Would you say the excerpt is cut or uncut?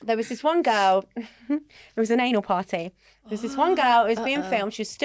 uncut